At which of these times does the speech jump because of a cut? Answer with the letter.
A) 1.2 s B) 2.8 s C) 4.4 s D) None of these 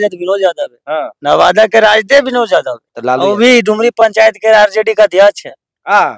B